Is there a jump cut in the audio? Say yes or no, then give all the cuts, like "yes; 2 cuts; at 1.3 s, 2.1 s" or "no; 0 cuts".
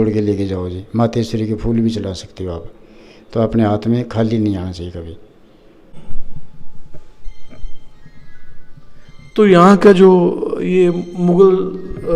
yes; 1 cut; at 5.9 s